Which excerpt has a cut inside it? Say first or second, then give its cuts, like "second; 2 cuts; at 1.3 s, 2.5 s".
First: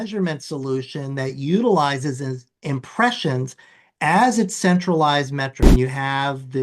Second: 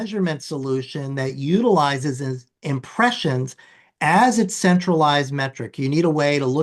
first; 1 cut; at 5.6 s